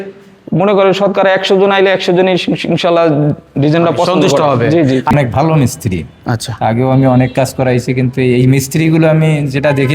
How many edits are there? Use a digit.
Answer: 1